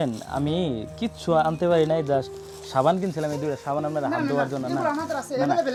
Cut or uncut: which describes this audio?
uncut